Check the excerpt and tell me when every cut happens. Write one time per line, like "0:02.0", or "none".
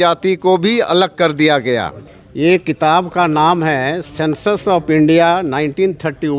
0:02.2